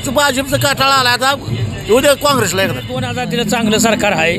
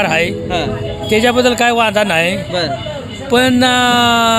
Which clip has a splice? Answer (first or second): first